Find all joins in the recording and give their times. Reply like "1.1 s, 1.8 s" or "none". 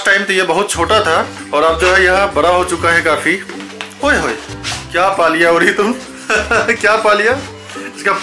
none